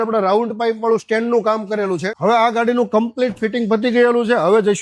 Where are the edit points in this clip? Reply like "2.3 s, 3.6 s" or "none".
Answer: 2.1 s